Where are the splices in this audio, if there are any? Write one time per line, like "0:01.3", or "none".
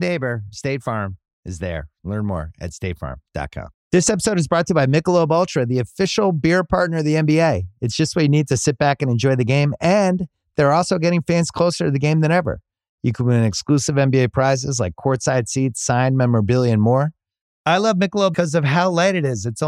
0:03.8